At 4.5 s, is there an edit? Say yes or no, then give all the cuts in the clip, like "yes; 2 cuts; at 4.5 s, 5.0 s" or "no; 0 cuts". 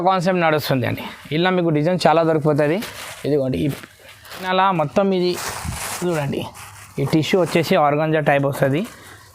yes; 1 cut; at 4.5 s